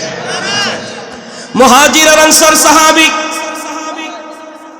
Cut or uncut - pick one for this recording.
cut